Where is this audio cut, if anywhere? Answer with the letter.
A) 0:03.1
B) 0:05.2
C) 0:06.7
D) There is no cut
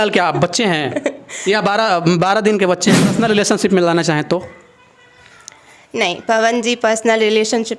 A